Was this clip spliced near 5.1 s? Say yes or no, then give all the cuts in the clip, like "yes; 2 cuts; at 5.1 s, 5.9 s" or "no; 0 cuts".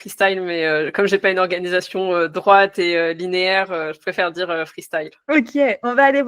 yes; 1 cut; at 5.1 s